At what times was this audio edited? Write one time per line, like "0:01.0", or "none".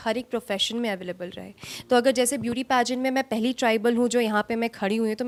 none